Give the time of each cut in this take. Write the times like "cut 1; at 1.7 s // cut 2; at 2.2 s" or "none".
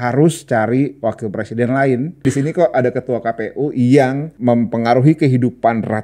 cut 1; at 2.2 s // cut 2; at 4.3 s